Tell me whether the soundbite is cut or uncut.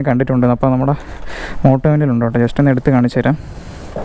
uncut